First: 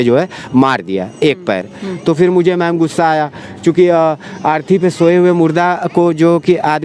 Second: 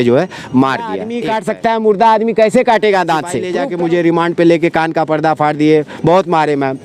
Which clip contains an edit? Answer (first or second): second